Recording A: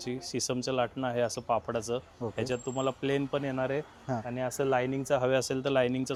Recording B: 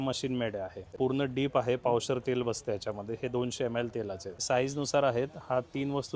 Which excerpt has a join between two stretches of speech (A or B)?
B